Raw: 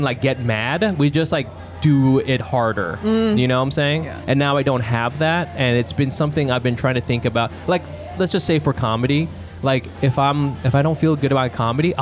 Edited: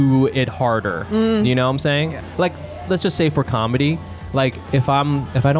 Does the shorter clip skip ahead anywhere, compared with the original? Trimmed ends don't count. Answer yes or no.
yes